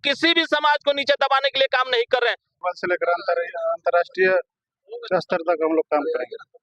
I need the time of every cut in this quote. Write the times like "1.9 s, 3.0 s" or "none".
2.6 s